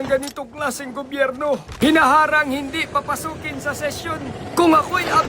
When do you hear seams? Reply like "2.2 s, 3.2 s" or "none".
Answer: 1.7 s